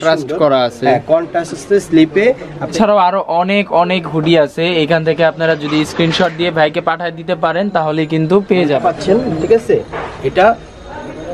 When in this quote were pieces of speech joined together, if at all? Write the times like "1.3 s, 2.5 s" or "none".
2.7 s, 8.8 s